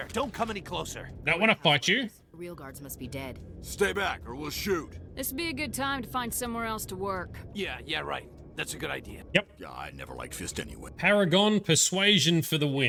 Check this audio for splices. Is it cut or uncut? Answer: uncut